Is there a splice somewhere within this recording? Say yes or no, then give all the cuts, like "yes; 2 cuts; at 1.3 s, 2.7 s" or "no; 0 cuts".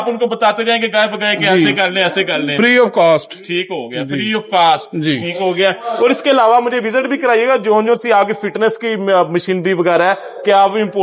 no; 0 cuts